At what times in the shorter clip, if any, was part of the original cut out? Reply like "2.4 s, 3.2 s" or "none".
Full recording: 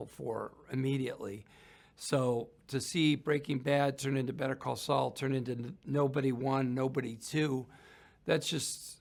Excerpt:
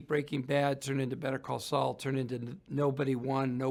none